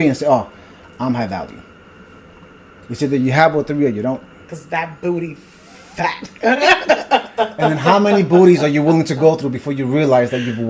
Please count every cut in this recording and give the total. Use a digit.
1